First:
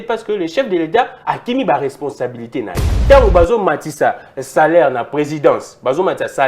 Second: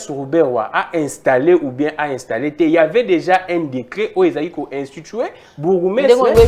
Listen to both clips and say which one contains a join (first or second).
first